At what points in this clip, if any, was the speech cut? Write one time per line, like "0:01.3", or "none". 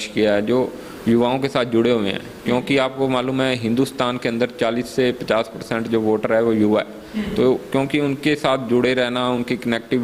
none